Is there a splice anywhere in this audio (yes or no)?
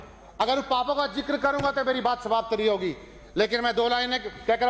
no